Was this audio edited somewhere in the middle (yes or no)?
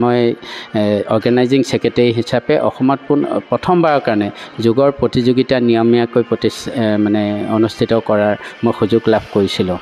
no